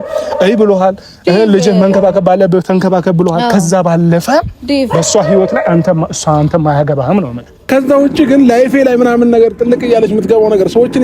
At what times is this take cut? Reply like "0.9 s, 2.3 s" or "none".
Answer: 7.6 s